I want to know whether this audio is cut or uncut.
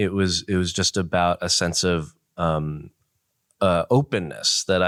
uncut